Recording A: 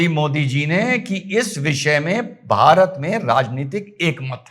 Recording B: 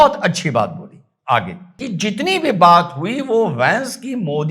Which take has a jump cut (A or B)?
B